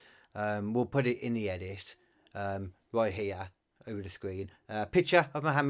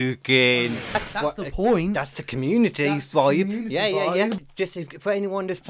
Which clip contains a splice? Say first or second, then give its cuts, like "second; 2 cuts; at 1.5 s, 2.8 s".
second; 2 cuts; at 0.9 s, 4.4 s